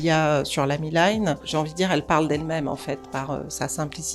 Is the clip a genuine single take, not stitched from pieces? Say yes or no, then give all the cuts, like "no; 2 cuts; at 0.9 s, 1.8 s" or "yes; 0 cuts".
no; 1 cut; at 1.4 s